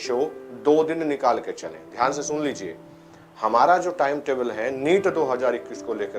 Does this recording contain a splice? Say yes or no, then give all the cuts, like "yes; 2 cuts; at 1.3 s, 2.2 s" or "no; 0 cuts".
no; 0 cuts